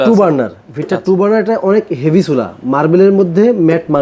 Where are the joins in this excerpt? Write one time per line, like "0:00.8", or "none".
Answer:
none